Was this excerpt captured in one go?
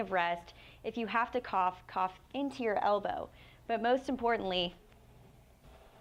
yes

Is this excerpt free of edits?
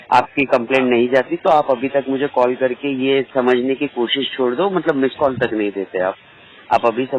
yes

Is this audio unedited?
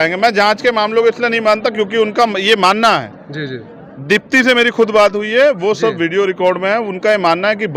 yes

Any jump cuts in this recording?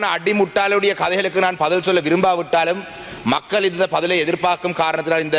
no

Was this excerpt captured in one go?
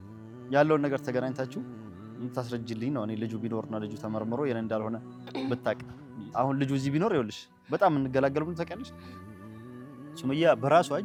yes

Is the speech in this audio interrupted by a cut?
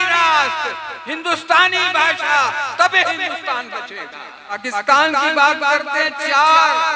yes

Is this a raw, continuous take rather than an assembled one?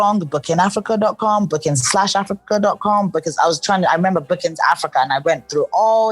yes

